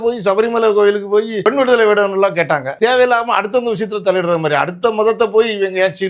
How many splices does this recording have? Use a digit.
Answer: 2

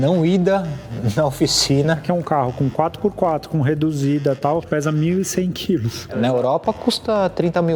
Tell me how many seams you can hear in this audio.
3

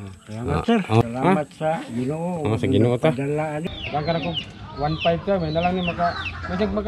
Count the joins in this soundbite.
2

